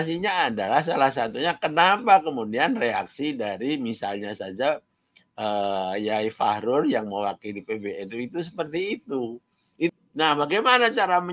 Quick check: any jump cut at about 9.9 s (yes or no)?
yes